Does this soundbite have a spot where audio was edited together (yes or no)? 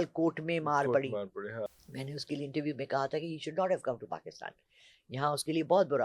yes